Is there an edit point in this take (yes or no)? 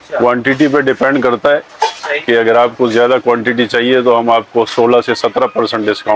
no